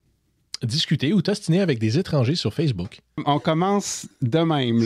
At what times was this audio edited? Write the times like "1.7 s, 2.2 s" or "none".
3.2 s